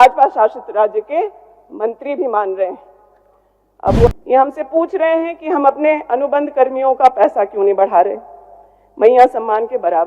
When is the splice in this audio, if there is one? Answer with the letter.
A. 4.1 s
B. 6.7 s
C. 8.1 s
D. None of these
A